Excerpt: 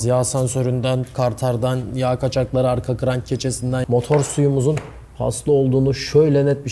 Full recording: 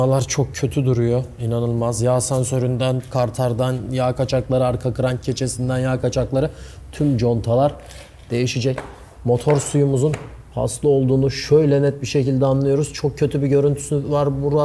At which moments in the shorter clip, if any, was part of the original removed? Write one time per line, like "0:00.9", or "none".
0:03.8